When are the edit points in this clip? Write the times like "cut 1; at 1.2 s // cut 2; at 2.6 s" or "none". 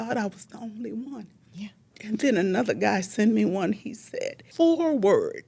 cut 1; at 1.9 s // cut 2; at 4.4 s